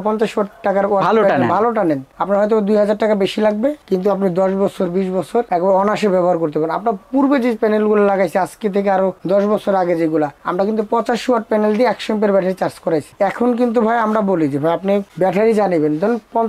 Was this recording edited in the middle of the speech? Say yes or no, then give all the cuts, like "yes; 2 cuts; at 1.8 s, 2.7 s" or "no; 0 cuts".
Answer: no; 0 cuts